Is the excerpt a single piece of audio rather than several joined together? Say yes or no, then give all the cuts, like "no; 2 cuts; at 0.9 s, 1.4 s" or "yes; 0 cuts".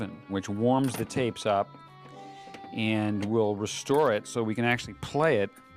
no; 1 cut; at 3.1 s